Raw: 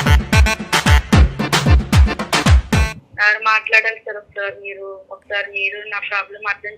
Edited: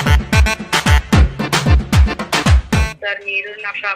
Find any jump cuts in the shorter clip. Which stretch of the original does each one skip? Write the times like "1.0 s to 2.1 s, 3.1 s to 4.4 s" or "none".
2.9 s to 5.2 s